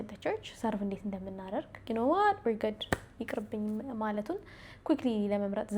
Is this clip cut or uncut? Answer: cut